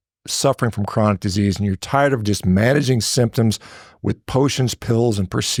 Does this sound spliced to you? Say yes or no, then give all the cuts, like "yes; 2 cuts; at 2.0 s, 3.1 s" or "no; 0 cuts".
no; 0 cuts